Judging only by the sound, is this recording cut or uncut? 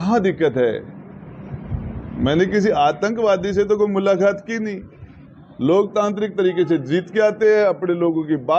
uncut